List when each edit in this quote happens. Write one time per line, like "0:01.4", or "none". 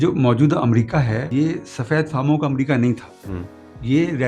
0:01.2

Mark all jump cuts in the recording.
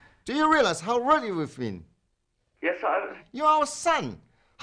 none

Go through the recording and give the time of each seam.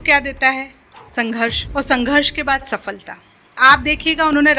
0:01.6
0:03.6

